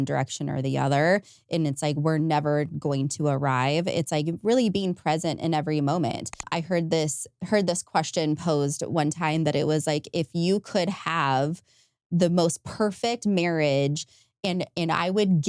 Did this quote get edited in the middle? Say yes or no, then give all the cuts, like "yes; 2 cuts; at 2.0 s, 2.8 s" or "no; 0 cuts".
yes; 1 cut; at 6.4 s